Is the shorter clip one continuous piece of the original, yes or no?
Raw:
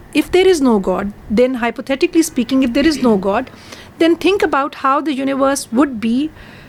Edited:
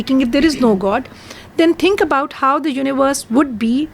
yes